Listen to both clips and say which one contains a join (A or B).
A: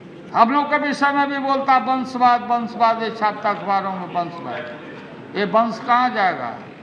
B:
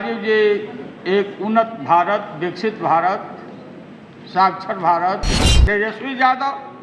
B